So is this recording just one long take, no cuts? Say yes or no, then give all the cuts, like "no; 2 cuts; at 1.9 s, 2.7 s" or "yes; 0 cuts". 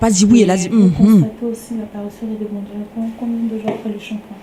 yes; 0 cuts